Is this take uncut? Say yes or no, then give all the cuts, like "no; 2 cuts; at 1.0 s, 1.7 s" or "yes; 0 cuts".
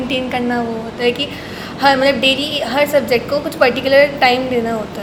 yes; 0 cuts